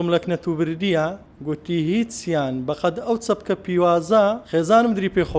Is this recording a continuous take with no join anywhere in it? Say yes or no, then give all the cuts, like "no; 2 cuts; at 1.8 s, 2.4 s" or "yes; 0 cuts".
no; 2 cuts; at 1.3 s, 4.4 s